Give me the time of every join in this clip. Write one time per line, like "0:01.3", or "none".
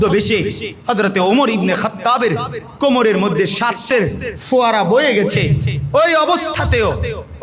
0:03.8

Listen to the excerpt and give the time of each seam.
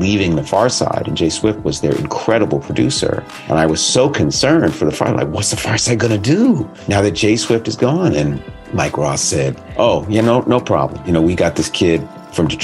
0:03.3
0:06.7
0:08.5
0:09.6
0:11.0

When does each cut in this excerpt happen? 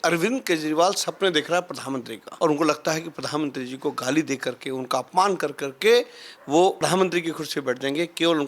0:02.2
0:06.8

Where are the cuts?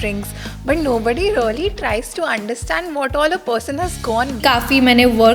0:04.4

